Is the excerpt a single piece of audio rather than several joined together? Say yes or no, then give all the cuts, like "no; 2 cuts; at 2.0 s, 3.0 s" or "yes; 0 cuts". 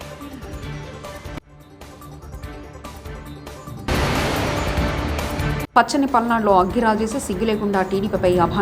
yes; 0 cuts